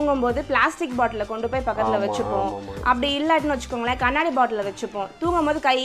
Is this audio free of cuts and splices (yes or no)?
yes